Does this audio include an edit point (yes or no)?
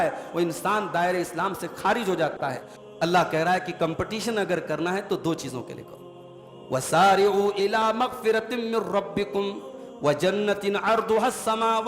yes